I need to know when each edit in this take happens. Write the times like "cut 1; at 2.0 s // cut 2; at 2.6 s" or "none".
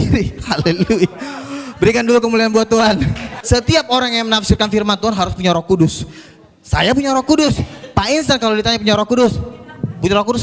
cut 1; at 3.3 s